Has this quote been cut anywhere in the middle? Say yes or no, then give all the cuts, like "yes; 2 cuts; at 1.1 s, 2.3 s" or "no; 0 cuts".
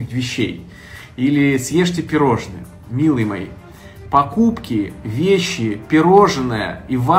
no; 0 cuts